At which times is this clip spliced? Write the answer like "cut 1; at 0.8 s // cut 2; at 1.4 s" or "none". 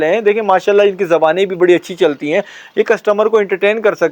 none

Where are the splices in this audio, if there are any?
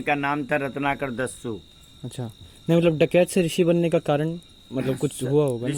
none

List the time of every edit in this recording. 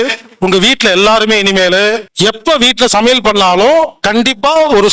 cut 1; at 2.1 s

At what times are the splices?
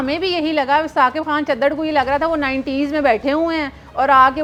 none

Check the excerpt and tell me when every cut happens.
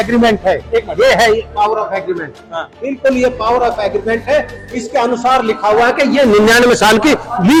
none

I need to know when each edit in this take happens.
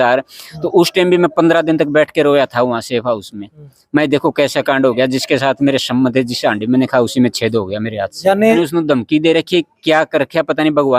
cut 1; at 8.6 s

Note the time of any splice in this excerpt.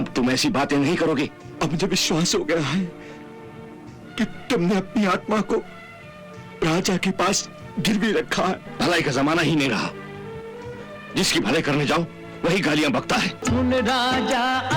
cut 1; at 1.4 s // cut 2; at 8.7 s // cut 3; at 13.4 s

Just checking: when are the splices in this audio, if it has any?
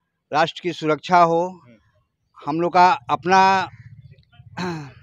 none

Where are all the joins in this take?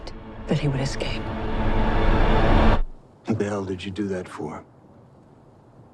none

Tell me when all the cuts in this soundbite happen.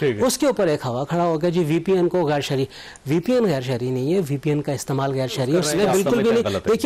cut 1; at 5.7 s

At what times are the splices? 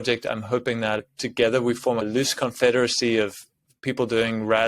cut 1; at 1.1 s // cut 2; at 2.0 s

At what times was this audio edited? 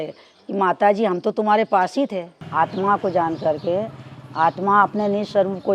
cut 1; at 2.4 s

